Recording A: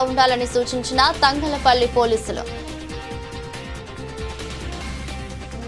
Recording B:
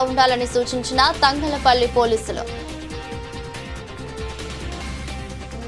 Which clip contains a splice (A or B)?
B